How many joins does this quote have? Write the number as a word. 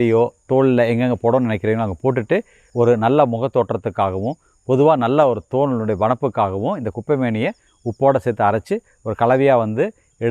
one